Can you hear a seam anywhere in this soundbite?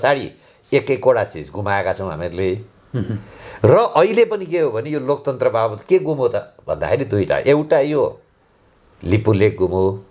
no; 0 cuts

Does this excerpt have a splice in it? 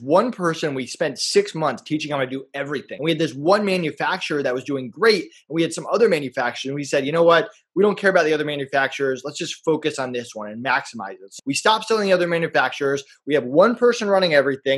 yes; 2 cuts; at 2.9 s, 11.3 s

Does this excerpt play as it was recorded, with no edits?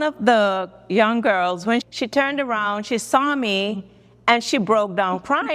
no; 1 cut; at 1.8 s

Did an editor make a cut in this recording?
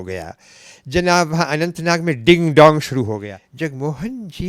yes; 1 cut; at 3.4 s

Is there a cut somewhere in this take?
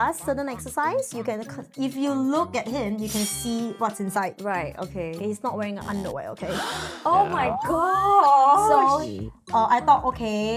no; 0 cuts

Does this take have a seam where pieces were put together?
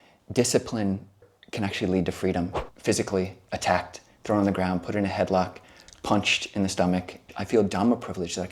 yes; 3 cuts; at 1.2 s, 2.6 s, 7.2 s

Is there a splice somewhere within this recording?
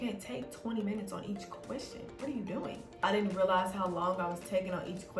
yes; 1 cut; at 2.9 s

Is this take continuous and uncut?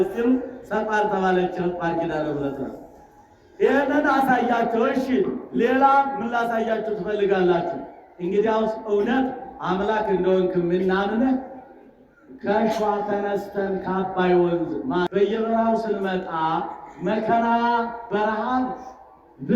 no; 1 cut; at 15.1 s

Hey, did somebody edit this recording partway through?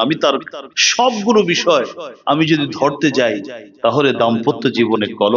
no; 0 cuts

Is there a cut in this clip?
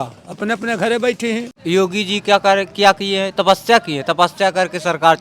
yes; 1 cut; at 1.5 s

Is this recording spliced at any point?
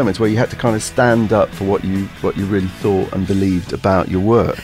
no; 0 cuts

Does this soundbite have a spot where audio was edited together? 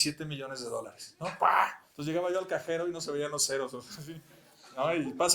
yes; 1 cut; at 1.9 s

